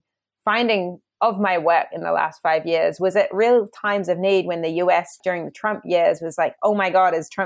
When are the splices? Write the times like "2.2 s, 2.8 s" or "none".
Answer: 1.0 s, 5.2 s